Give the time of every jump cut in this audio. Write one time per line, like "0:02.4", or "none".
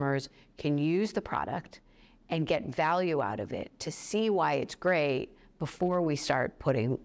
none